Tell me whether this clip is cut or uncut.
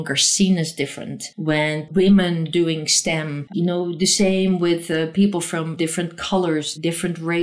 cut